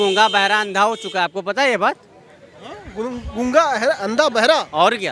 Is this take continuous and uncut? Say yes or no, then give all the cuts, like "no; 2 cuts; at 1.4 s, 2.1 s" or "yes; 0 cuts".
yes; 0 cuts